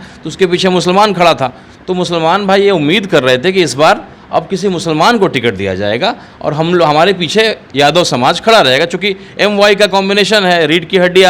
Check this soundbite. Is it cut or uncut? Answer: uncut